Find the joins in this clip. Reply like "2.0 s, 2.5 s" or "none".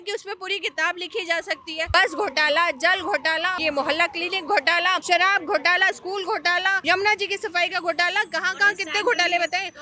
1.9 s, 3.6 s, 5.0 s, 6.8 s